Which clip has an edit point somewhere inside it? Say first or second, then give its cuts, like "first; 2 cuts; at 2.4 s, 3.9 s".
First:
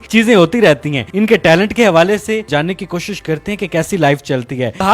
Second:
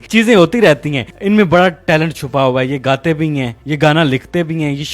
second; 1 cut; at 1.0 s